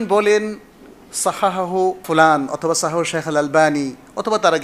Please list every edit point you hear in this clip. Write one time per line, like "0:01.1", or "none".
0:02.0